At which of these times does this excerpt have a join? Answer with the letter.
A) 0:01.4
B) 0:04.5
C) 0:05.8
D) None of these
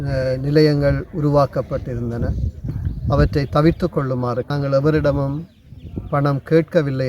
B